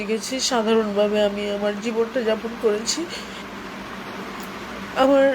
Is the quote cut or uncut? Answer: cut